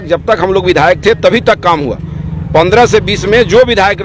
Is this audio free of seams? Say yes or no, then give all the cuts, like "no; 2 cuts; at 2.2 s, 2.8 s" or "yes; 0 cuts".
yes; 0 cuts